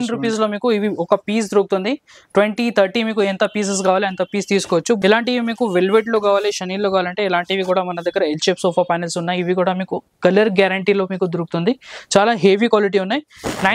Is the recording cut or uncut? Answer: cut